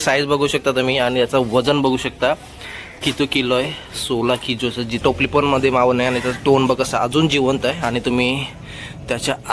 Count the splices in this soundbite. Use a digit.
1